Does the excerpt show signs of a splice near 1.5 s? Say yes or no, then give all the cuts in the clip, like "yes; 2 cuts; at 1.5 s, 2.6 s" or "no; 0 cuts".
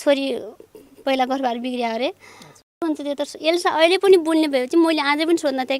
no; 1 cut; at 2.8 s